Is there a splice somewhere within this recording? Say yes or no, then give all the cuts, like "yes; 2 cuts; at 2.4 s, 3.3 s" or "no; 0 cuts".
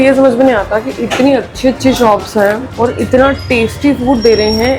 yes; 1 cut; at 2.7 s